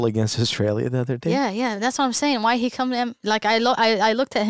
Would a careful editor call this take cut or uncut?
uncut